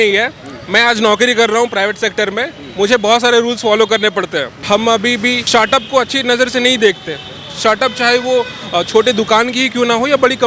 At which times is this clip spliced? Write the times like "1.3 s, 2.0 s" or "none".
4.6 s, 5.4 s